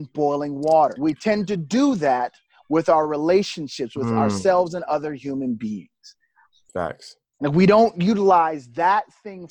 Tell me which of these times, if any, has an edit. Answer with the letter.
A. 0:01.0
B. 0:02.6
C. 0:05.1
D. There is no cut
A